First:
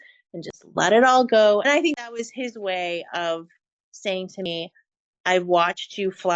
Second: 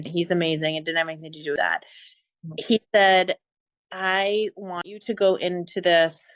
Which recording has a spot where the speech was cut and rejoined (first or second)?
first